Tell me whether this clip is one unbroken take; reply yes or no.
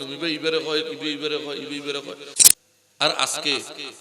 no